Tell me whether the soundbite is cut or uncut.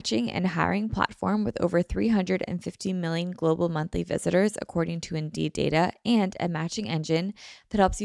uncut